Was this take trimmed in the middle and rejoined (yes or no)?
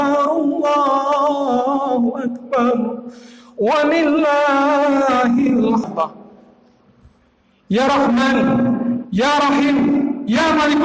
yes